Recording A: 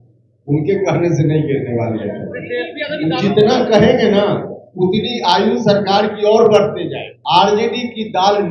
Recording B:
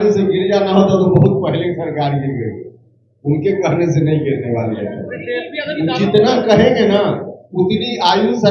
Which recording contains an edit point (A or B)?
A